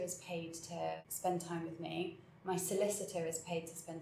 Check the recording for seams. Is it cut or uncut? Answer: cut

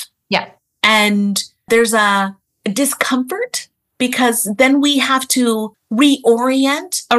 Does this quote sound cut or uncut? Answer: cut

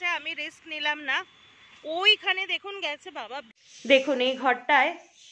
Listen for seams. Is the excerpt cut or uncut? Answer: cut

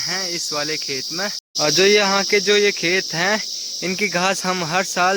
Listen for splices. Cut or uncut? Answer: cut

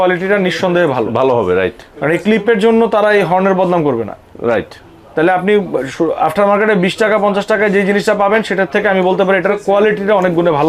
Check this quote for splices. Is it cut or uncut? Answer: uncut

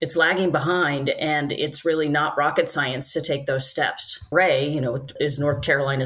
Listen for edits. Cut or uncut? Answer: cut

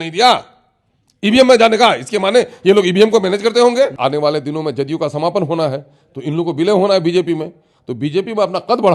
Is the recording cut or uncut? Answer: cut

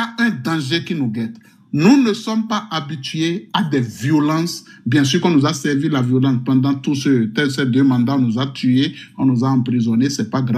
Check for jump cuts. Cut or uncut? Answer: uncut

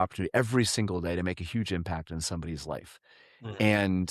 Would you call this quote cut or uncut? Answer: uncut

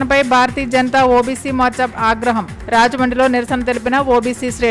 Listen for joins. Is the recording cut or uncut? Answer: uncut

